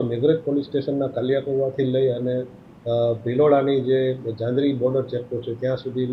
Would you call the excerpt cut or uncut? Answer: uncut